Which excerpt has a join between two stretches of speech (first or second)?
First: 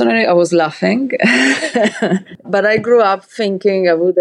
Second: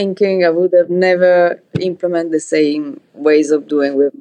first